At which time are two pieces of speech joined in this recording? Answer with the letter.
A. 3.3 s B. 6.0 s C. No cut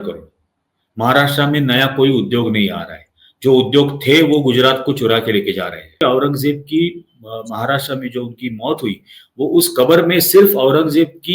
B